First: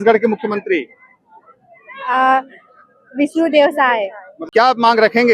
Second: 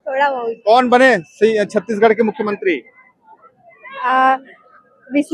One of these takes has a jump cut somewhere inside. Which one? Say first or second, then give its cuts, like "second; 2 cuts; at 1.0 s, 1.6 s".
first; 1 cut; at 4.3 s